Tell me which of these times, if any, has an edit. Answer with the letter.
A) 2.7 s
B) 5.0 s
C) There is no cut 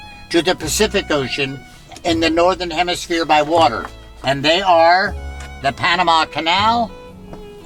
C